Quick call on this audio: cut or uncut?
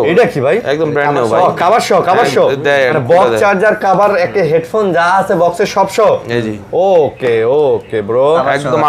uncut